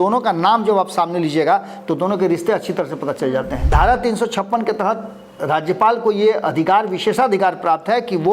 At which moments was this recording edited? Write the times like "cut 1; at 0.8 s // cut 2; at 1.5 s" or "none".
cut 1; at 3.6 s